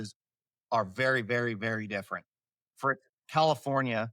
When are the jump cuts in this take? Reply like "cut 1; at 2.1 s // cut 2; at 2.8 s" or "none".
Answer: none

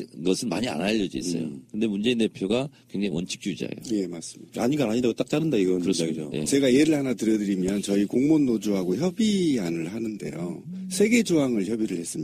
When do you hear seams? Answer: cut 1; at 8.6 s

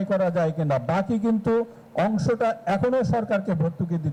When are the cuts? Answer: none

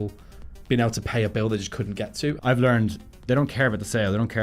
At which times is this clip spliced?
cut 1; at 2.4 s

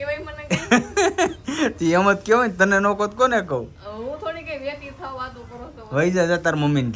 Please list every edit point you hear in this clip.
none

